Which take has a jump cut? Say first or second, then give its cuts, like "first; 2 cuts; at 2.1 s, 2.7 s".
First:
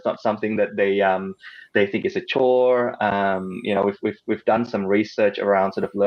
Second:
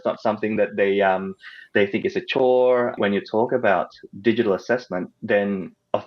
second; 2 cuts; at 3.0 s, 5.1 s